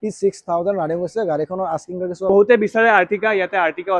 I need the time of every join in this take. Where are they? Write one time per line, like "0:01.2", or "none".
0:02.3